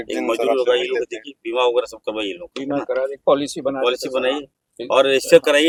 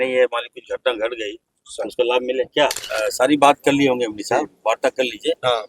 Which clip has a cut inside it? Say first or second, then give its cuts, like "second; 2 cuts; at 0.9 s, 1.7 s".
second; 1 cut; at 2.9 s